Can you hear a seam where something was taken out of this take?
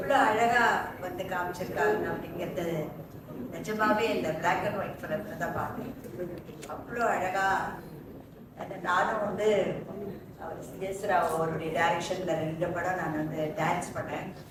no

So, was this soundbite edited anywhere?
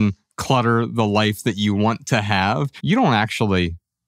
yes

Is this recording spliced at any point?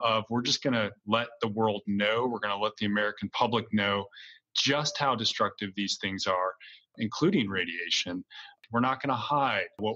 yes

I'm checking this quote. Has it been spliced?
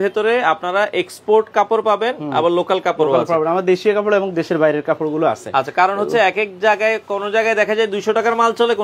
no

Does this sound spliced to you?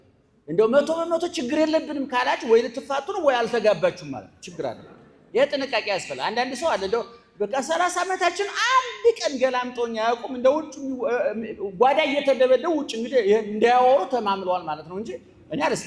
no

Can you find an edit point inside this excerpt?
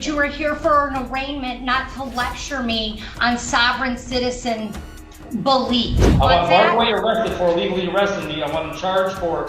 yes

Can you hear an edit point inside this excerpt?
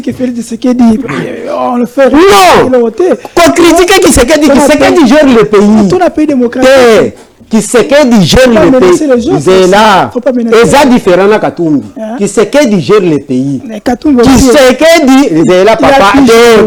no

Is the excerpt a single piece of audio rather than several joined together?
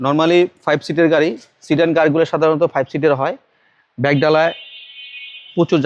yes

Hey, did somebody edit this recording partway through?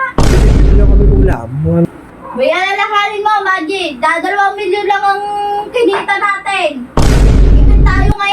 yes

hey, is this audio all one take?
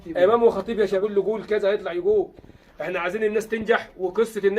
no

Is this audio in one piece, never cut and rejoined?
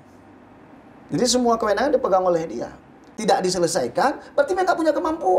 no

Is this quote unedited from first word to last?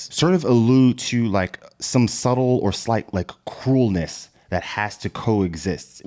yes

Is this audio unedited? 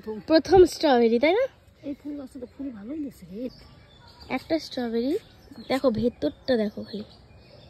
no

